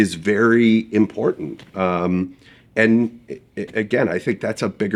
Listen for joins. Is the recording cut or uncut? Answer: uncut